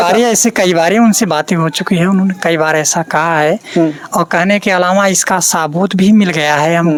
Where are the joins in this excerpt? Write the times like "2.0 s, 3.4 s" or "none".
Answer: none